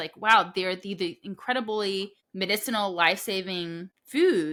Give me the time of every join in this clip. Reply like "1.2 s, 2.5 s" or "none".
none